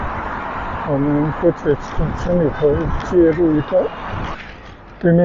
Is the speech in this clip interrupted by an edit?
yes; 1 cut; at 4.2 s

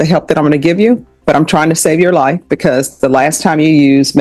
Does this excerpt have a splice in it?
no; 0 cuts

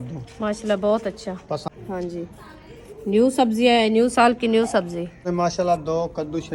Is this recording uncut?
no; 2 cuts; at 1.6 s, 5.3 s

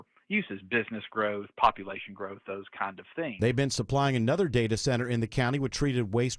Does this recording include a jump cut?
no; 0 cuts

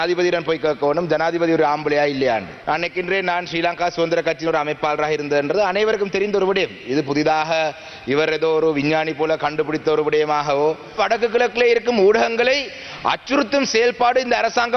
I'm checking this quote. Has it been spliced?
yes; 2 cuts; at 2.5 s, 11.0 s

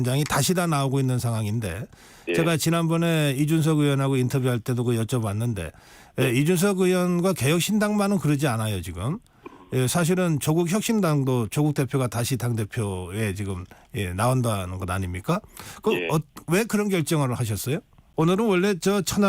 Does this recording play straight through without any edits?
no; 1 cut; at 18.0 s

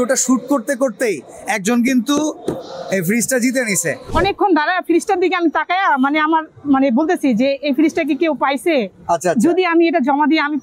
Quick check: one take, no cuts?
no; 1 cut; at 4.1 s

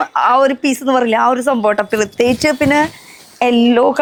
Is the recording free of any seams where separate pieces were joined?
yes; 0 cuts

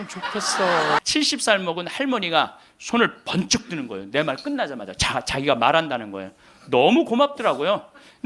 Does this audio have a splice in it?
yes; 1 cut; at 1.0 s

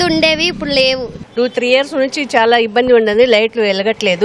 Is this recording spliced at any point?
yes; 1 cut; at 1.1 s

